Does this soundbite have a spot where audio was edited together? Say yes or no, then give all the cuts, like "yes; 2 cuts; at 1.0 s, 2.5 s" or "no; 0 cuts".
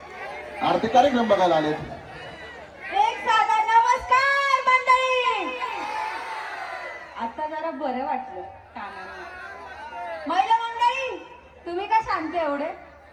no; 0 cuts